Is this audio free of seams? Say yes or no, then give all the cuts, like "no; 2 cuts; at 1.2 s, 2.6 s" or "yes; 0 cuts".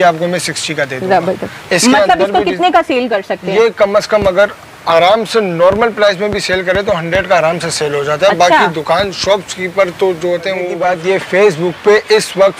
no; 1 cut; at 10.7 s